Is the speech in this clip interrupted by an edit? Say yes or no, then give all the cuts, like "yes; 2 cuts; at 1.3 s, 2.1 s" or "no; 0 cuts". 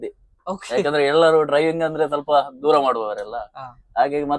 no; 0 cuts